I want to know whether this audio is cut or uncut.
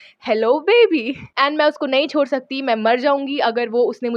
cut